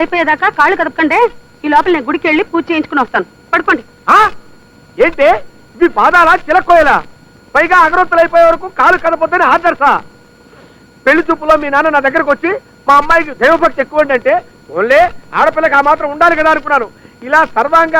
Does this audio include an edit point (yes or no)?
no